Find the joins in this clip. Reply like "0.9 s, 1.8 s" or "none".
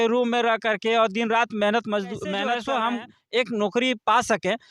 2.4 s